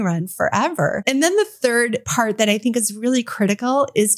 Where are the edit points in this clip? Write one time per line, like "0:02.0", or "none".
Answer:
0:01.0
0:02.0